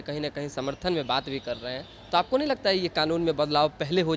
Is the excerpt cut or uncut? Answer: uncut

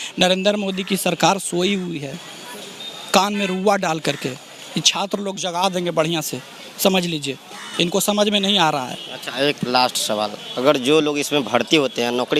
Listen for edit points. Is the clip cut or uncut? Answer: uncut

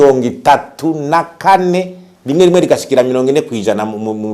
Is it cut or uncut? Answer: uncut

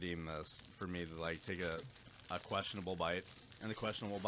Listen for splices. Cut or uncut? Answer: uncut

